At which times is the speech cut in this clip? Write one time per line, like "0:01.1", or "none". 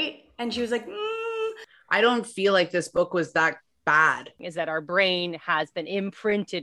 0:01.6
0:04.4